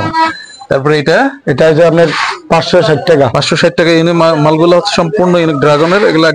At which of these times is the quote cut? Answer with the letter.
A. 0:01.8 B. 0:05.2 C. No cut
C